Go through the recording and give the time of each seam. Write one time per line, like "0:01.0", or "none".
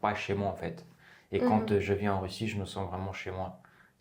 none